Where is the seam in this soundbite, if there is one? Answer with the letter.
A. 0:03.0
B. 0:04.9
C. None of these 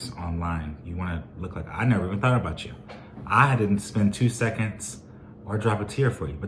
C